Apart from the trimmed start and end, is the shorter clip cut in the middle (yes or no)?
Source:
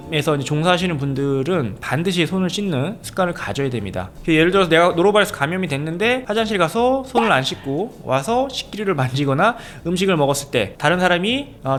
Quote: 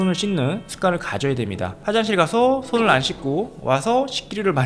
yes